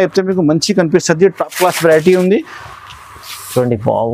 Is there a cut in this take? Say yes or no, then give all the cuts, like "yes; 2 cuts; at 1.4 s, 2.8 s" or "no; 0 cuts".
no; 0 cuts